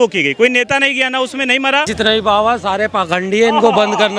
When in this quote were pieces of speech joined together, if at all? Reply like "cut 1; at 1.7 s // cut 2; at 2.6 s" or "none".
cut 1; at 1.9 s